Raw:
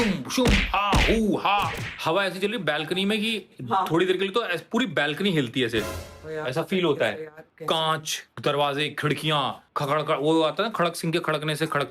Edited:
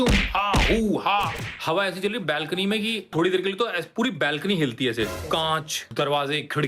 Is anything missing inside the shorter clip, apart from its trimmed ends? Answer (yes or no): yes